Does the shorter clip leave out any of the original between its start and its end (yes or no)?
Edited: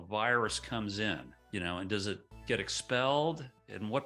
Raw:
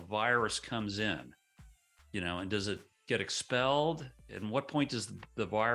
yes